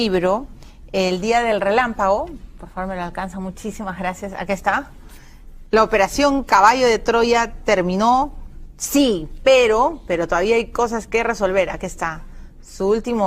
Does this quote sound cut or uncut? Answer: cut